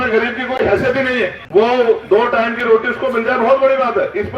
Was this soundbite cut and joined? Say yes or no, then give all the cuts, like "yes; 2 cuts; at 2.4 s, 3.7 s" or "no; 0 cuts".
yes; 1 cut; at 1.4 s